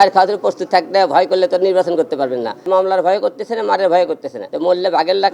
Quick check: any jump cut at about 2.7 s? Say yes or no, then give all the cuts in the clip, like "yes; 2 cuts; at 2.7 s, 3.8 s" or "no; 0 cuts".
yes; 2 cuts; at 2.7 s, 4.4 s